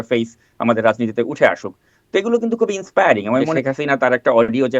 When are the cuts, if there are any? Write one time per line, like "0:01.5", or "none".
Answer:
0:03.5